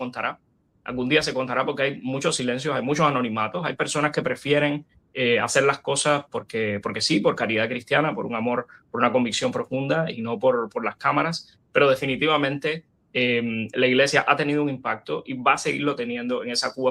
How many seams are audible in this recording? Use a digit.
0